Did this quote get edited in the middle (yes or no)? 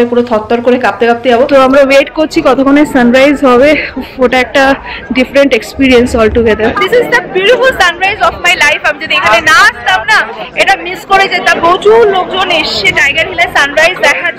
yes